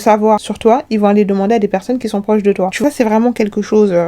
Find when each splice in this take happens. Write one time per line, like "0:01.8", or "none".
0:02.8